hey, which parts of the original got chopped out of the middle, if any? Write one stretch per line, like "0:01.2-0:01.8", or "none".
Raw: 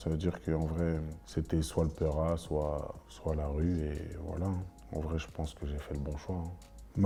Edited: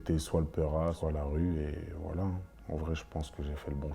0:02.4-0:03.2